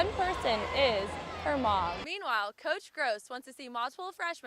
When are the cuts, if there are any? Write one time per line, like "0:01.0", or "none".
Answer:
0:01.9

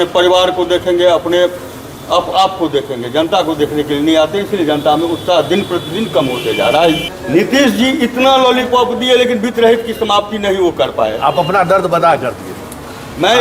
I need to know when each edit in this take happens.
0:07.0

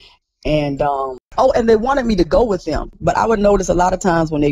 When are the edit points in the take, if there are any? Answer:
0:01.3
0:02.9

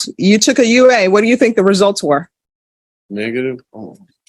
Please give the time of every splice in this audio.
none

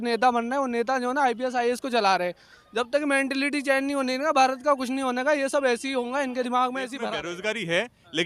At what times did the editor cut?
0:07.0

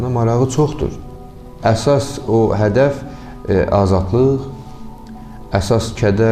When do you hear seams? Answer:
0:01.4

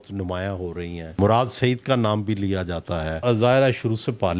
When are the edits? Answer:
0:01.2
0:03.1

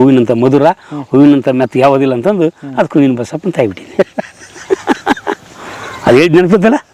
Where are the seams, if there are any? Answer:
none

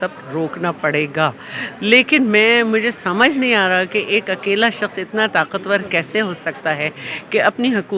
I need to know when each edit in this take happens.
none

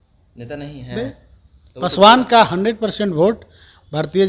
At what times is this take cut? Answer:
none

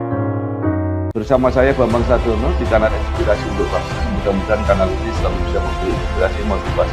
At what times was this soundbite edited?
0:01.1

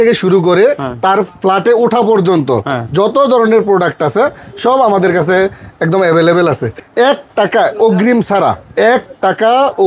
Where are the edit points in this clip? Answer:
0:06.8

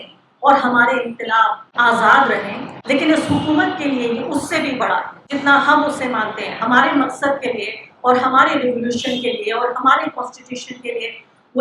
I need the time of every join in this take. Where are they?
0:01.7

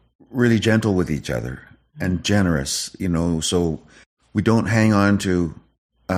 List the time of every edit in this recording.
none

